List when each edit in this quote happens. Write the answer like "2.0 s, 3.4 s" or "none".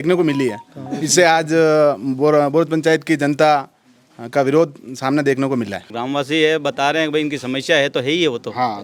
5.9 s